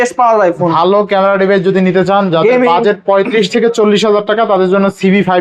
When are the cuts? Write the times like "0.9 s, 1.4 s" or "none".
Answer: none